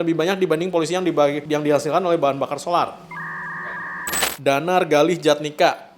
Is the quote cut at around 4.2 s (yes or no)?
yes